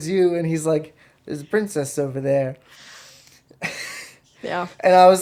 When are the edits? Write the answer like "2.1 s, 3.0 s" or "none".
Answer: none